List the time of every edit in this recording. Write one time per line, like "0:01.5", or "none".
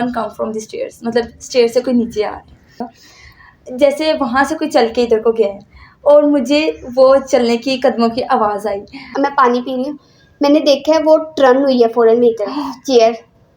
0:03.0
0:09.0